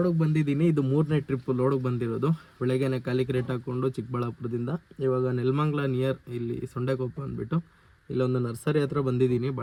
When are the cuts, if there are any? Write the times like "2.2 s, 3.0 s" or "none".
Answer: none